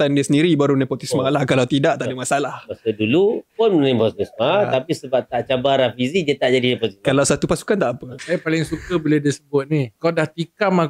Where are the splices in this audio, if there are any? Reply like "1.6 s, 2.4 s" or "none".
8.1 s, 9.9 s